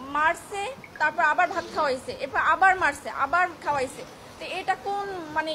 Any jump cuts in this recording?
no; 0 cuts

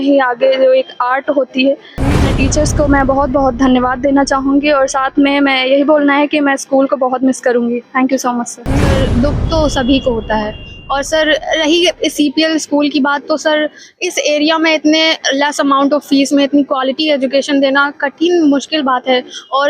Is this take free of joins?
no; 2 cuts; at 2.3 s, 9.0 s

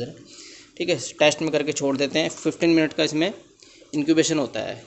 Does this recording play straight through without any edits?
yes; 0 cuts

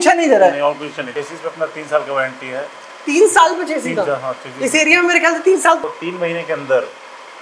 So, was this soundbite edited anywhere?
yes; 2 cuts; at 1.0 s, 5.9 s

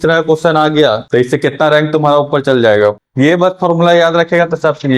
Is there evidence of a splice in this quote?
yes; 1 cut; at 3.0 s

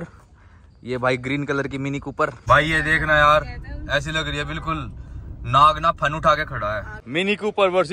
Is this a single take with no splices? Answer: no; 2 cuts; at 2.4 s, 7.0 s

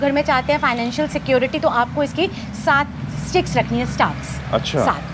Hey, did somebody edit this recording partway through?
no; 0 cuts

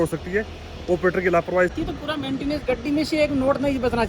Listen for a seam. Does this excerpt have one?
yes; 1 cut; at 1.7 s

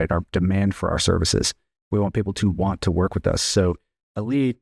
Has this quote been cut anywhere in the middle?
no; 0 cuts

